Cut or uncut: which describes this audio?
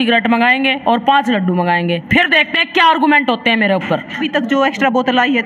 cut